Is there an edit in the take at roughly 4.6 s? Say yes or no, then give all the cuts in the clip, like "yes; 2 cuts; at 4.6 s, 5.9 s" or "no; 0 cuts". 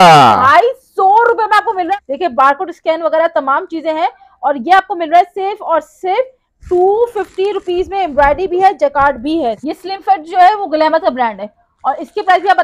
no; 2 cuts; at 1.9 s, 9.6 s